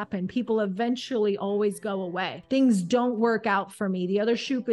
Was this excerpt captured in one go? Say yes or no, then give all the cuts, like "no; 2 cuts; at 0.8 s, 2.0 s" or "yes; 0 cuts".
no; 1 cut; at 2.3 s